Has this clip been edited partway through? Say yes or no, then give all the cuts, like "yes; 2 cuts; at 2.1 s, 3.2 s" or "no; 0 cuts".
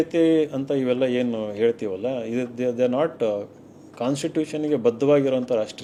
no; 0 cuts